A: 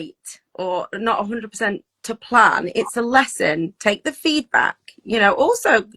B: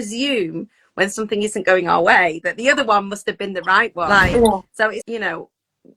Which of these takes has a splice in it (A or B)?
B